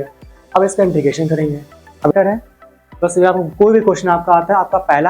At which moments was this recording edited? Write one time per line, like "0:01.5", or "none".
0:02.1